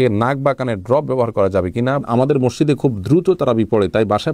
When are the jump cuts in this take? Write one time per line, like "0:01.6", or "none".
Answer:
0:02.0